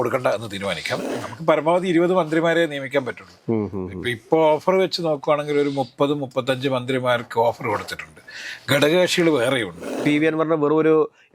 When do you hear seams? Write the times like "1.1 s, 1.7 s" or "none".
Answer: 1.0 s, 10.0 s